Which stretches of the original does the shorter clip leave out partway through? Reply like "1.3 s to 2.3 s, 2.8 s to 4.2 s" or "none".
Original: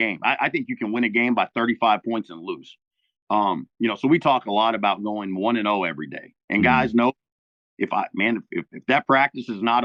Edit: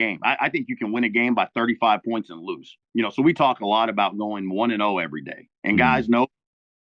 2.8 s to 3.7 s